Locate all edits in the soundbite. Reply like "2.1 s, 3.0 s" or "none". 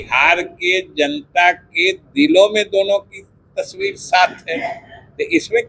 none